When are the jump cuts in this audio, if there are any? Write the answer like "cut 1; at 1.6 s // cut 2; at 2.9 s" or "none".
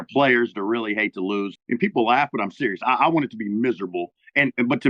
cut 1; at 1.6 s